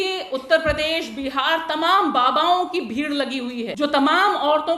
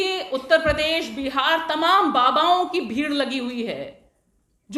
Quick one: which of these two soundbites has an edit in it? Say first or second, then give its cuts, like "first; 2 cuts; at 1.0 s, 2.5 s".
first; 1 cut; at 3.7 s